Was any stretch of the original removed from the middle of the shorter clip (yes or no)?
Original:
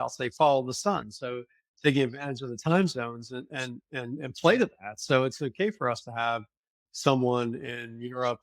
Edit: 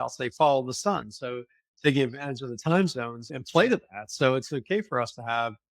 yes